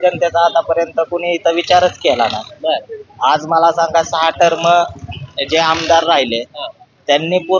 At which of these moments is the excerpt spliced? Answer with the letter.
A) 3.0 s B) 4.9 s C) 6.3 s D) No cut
D